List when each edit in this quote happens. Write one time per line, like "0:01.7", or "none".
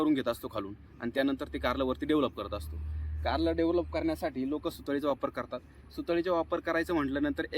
none